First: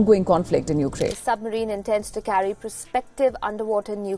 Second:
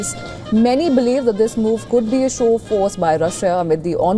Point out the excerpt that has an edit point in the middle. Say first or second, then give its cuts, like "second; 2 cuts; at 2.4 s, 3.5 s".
first; 1 cut; at 1.2 s